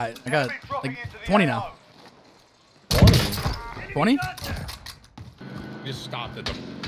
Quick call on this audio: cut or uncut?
cut